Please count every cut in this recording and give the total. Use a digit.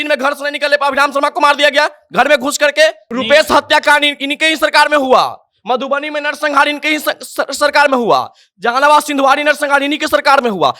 1